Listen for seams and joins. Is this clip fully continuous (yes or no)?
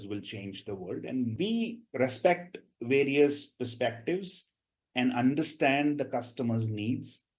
no